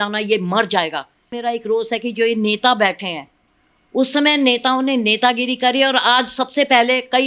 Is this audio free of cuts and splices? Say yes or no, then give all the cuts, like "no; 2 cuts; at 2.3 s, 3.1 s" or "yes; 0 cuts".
no; 1 cut; at 1.3 s